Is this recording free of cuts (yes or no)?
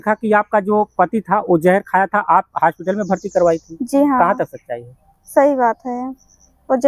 yes